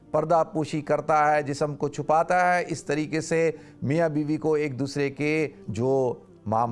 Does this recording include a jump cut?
yes; 1 cut; at 5.6 s

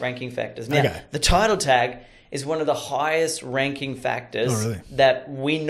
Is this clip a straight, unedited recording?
yes; 0 cuts

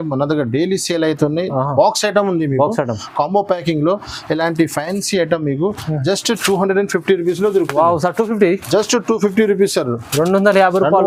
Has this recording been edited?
no; 0 cuts

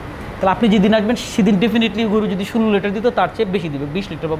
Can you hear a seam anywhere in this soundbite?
no; 0 cuts

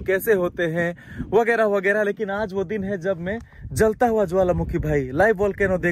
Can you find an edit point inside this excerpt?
no; 0 cuts

